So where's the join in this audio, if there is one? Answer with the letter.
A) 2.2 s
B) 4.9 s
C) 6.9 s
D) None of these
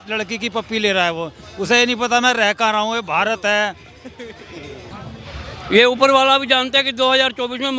B